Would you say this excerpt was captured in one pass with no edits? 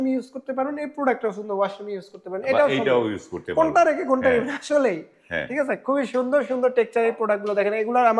yes; 0 cuts

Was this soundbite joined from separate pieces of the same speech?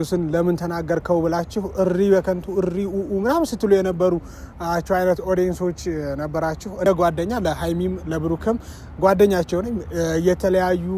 yes; 1 cut; at 6.9 s

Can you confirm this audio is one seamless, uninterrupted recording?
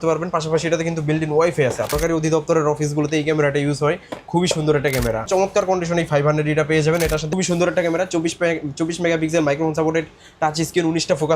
no; 3 cuts; at 2.0 s, 5.3 s, 7.3 s

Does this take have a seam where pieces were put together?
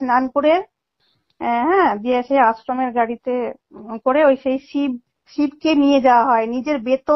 no; 0 cuts

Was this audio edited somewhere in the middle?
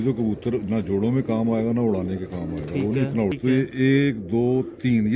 yes; 1 cut; at 3.3 s

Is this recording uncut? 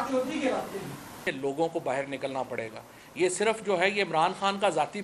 no; 1 cut; at 1.2 s

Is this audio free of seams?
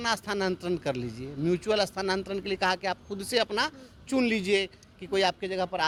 yes; 0 cuts

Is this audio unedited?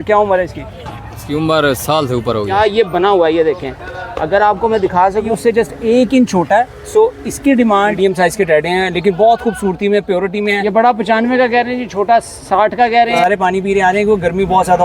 no; 5 cuts; at 2.5 s, 5.3 s, 7.9 s, 10.6 s, 13.2 s

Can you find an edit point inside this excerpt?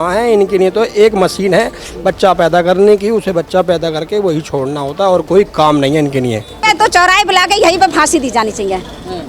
yes; 1 cut; at 6.6 s

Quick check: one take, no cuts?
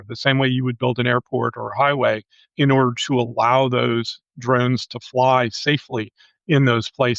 yes; 0 cuts

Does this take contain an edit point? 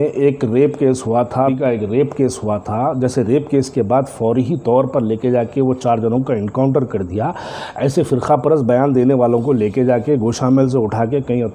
yes; 1 cut; at 1.5 s

